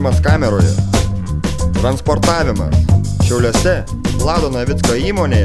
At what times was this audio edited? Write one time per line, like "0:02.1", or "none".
none